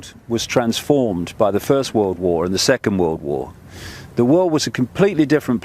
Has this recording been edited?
yes; 1 cut; at 2.8 s

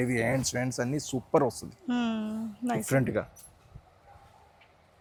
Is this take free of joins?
yes; 0 cuts

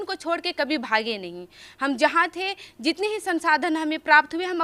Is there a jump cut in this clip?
no; 0 cuts

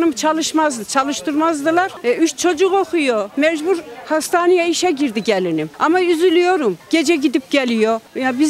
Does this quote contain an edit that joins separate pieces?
no; 0 cuts

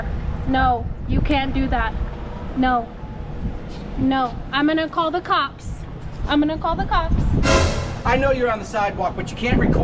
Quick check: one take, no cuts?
no; 1 cut; at 8.0 s

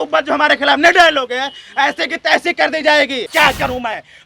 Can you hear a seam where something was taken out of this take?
yes; 1 cut; at 3.3 s

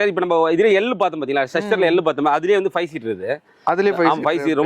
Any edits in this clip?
no; 0 cuts

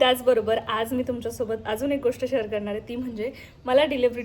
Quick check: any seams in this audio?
no; 0 cuts

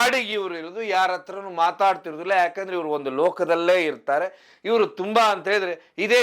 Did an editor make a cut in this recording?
no; 0 cuts

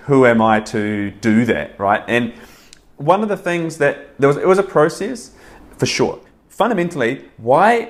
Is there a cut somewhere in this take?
yes; 1 cut; at 6.3 s

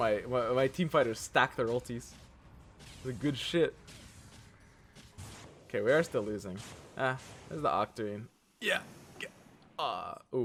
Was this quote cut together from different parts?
no; 0 cuts

